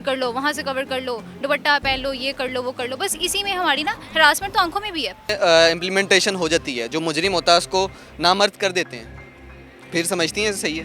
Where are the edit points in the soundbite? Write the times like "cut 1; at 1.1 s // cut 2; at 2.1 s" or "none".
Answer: cut 1; at 5.3 s